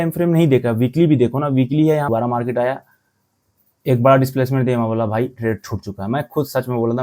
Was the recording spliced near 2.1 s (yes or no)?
yes